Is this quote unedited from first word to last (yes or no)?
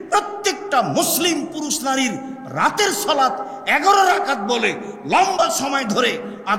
yes